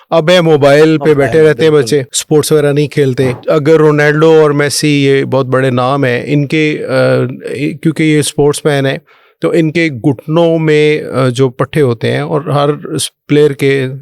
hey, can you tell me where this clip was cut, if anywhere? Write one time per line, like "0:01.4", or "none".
0:02.1
0:03.4